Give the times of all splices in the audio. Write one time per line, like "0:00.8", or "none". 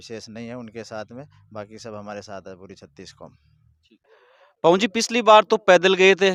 none